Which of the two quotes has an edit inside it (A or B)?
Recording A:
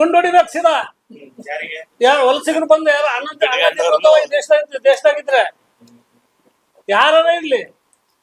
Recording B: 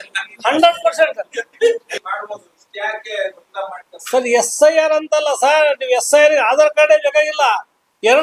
B